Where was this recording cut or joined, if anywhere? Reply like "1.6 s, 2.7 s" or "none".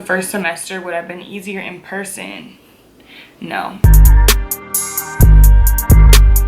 3.8 s